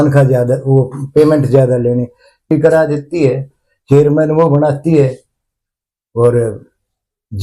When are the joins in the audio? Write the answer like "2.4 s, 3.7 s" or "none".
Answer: 2.5 s

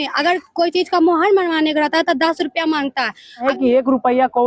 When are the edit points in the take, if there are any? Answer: 3.4 s

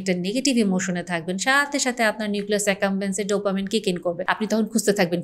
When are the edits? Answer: 4.2 s

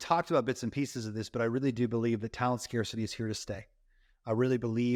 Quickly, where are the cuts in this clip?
none

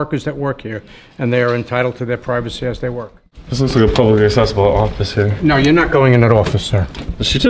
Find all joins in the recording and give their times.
3.4 s

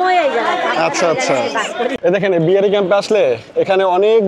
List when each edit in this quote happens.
2.0 s

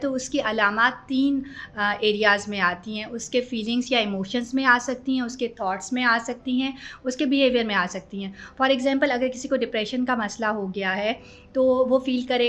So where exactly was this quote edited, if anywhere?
none

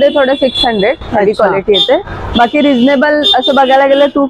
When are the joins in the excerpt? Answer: none

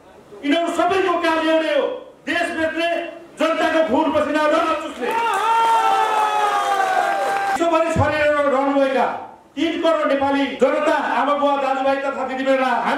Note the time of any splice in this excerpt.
7.6 s, 10.5 s

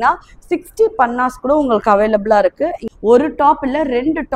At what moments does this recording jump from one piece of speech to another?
2.9 s

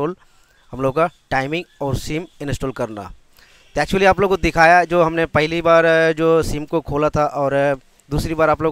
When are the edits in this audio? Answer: none

